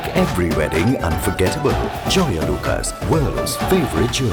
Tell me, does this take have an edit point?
no; 0 cuts

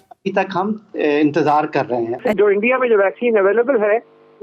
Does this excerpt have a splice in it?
yes; 1 cut; at 2.2 s

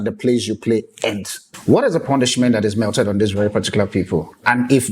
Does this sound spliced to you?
yes; 1 cut; at 1.4 s

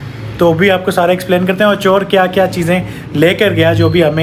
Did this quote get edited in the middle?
no; 0 cuts

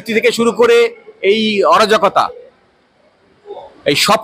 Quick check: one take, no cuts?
yes; 0 cuts

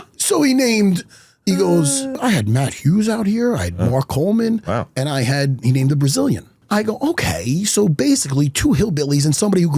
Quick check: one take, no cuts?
no; 2 cuts; at 2.2 s, 6.6 s

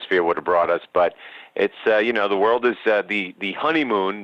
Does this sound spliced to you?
no; 0 cuts

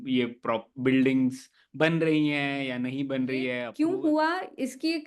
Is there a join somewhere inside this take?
yes; 1 cut; at 3.6 s

